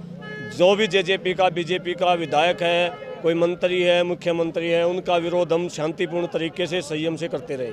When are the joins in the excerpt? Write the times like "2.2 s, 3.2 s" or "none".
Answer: none